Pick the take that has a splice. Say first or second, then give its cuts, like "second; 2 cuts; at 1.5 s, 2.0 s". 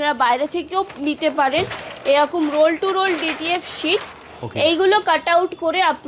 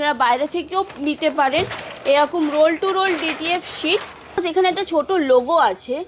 second; 1 cut; at 4.4 s